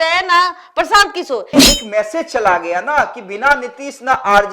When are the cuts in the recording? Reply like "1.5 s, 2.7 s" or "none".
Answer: 1.5 s

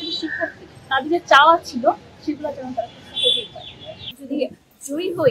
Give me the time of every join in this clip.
4.1 s

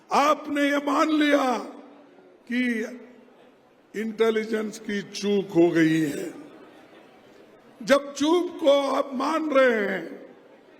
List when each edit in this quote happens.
none

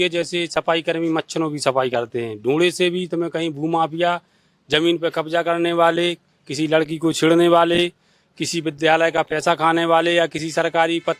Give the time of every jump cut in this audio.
none

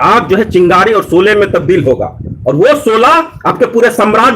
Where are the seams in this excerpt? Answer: none

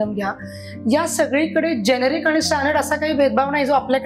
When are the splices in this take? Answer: none

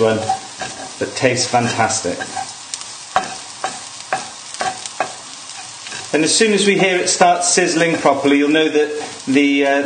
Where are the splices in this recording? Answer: 3.8 s

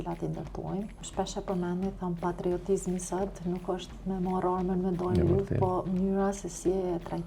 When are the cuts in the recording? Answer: 1.0 s

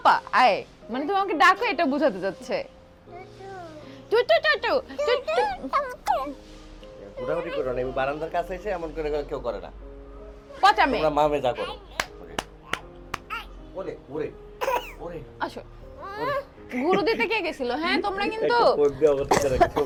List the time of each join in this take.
none

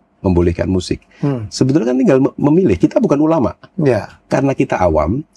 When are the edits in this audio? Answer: none

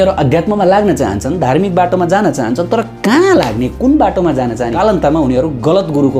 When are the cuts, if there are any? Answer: 4.7 s

